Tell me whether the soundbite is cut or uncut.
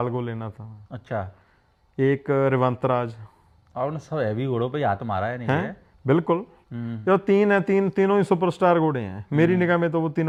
uncut